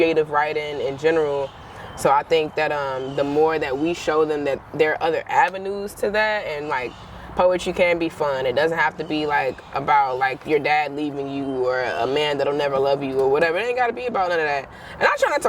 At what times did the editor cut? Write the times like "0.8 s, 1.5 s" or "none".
none